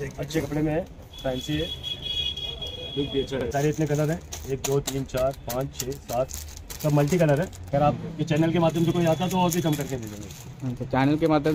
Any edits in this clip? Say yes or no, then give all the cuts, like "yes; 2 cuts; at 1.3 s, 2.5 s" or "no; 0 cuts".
yes; 2 cuts; at 3.5 s, 7.6 s